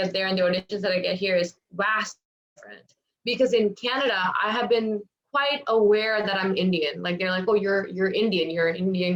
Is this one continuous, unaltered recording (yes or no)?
yes